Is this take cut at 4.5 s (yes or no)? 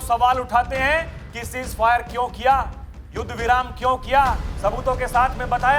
yes